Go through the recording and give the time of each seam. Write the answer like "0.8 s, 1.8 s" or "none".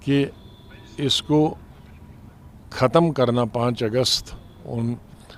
none